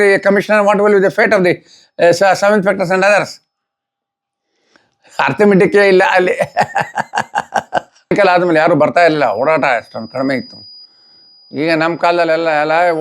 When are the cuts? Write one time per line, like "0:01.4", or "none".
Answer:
0:08.1